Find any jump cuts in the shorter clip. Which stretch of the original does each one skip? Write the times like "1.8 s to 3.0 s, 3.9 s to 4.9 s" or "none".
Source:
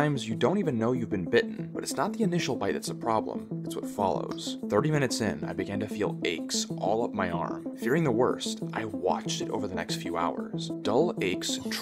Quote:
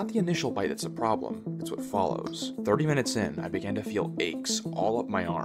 none

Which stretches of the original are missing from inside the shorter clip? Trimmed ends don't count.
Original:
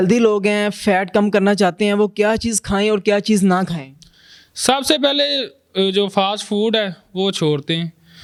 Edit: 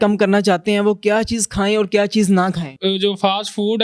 3.8 s to 5.6 s

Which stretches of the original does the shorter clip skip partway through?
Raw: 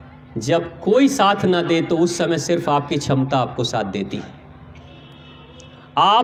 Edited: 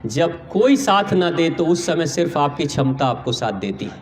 none

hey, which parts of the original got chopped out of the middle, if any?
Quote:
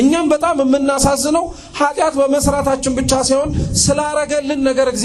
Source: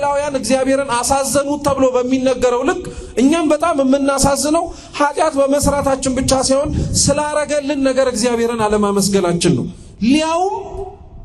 none

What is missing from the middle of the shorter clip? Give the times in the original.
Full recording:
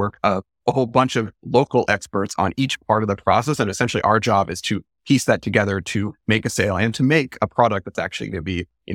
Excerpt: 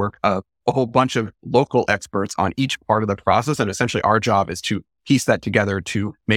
none

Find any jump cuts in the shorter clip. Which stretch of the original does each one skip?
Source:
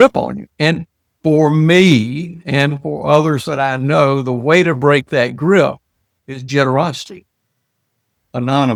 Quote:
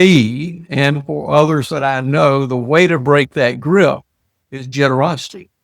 none

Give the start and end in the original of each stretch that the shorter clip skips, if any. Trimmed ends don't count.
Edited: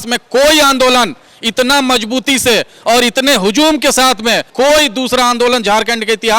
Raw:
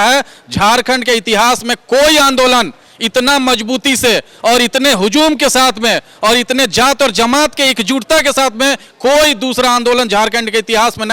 6.0 s to 8.9 s

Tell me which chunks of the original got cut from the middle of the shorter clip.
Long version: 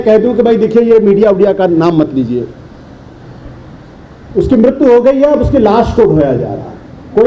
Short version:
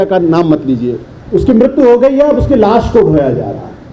2.6 s to 4.1 s

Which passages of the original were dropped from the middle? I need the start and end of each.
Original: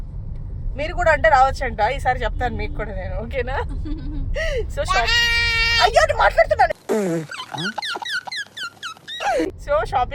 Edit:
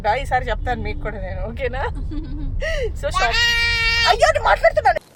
none

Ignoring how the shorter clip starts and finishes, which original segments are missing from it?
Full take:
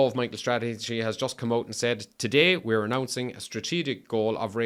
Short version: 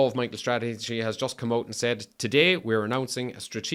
none

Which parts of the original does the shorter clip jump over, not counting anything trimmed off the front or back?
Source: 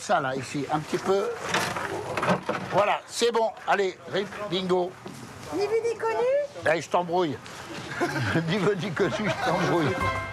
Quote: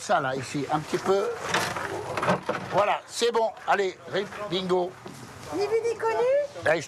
none

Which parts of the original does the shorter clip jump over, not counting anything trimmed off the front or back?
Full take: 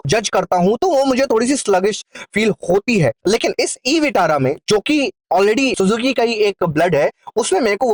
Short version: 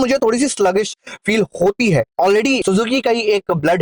3.2 s to 5.2 s

